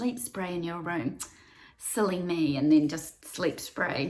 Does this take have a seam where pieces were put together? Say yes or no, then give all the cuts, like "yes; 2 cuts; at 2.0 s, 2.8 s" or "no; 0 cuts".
yes; 1 cut; at 3.2 s